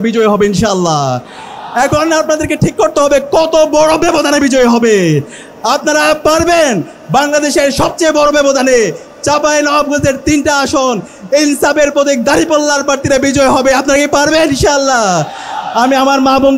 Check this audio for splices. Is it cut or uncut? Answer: uncut